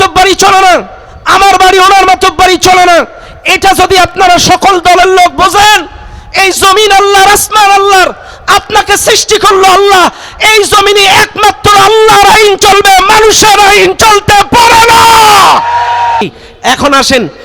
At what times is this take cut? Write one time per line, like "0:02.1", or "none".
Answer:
0:16.2